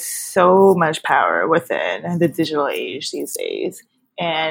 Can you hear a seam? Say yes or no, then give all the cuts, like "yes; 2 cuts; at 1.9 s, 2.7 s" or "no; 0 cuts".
no; 0 cuts